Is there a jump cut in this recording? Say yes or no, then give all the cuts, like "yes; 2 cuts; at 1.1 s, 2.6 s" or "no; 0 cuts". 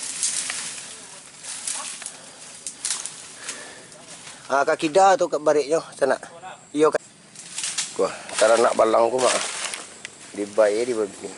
yes; 1 cut; at 7.0 s